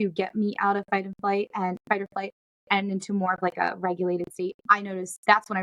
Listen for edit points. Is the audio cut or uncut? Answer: uncut